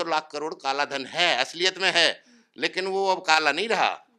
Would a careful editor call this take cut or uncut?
uncut